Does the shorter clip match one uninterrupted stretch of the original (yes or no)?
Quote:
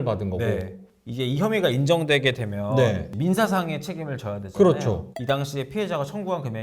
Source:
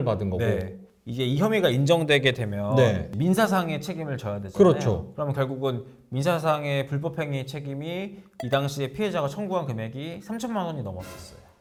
no